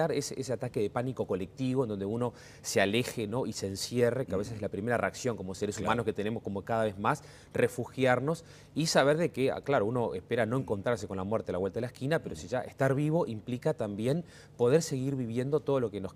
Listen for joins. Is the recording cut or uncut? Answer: uncut